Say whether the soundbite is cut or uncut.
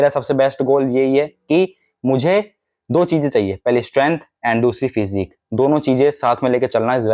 uncut